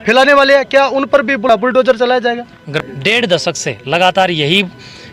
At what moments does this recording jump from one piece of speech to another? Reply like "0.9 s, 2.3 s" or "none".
1.5 s, 2.6 s